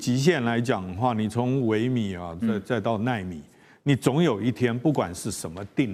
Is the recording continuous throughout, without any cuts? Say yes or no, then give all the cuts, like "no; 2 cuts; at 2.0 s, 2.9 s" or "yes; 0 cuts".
yes; 0 cuts